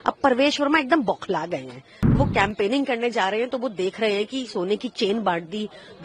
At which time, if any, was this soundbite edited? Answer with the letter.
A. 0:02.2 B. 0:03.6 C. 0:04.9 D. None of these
A